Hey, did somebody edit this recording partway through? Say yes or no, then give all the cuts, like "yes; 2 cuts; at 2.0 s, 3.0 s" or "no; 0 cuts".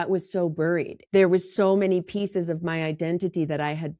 yes; 1 cut; at 0.9 s